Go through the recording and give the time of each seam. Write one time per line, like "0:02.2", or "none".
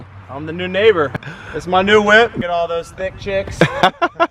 0:01.2
0:02.4